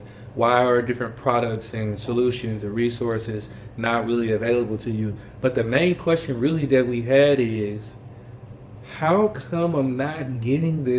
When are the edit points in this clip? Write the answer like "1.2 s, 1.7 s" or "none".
none